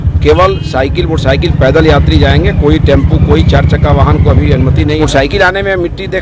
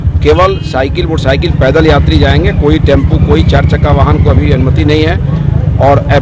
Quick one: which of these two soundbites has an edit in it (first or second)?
first